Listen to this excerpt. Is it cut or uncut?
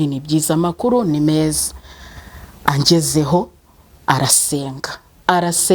uncut